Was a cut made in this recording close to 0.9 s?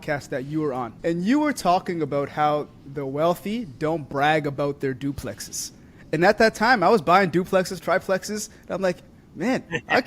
yes; 1 cut; at 0.9 s

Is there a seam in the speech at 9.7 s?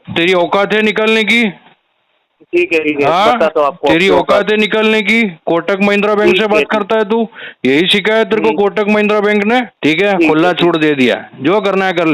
yes; 1 cut; at 9.7 s

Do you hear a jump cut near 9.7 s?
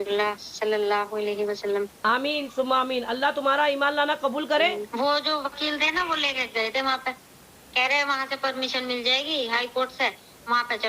no; 1 cut; at 4.8 s

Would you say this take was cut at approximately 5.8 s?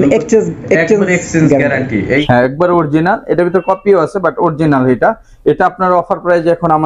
no; 1 cut; at 2.2 s

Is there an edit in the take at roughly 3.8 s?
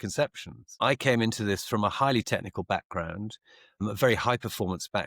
yes; 1 cut; at 3.8 s

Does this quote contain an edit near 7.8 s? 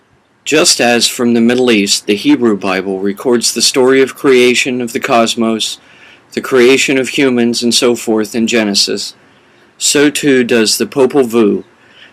yes; 1 cut; at 7.8 s

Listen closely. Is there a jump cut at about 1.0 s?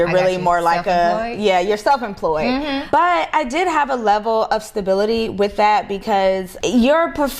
no; 2 cuts; at 2.8 s, 6.5 s

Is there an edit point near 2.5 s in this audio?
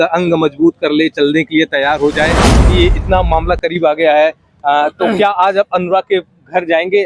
yes; 1 cut; at 2.5 s

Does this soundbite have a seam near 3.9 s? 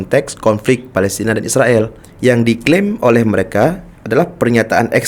yes; 2 cuts; at 2.0 s, 3.9 s

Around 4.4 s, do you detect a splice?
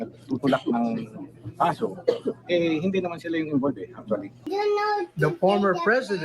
yes; 1 cut; at 4.4 s

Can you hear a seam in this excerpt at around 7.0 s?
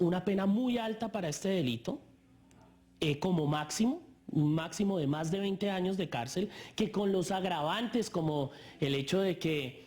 yes; 1 cut; at 7.0 s

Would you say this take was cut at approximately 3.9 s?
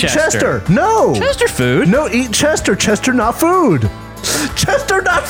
yes; 1 cut; at 3.9 s

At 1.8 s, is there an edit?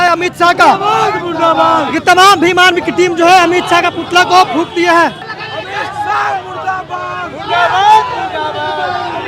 no; 0 cuts

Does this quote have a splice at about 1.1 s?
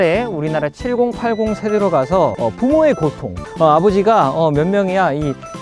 no; 2 cuts; at 2.3 s, 3.4 s

